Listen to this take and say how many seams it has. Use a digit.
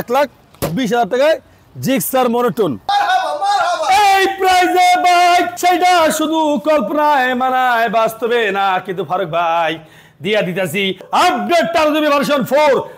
2